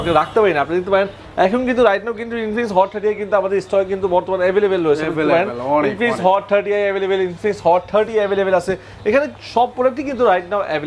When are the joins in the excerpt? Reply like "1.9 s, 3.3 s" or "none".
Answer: none